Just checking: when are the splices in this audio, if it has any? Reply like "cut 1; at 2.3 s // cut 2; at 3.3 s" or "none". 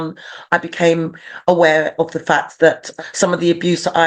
cut 1; at 2.9 s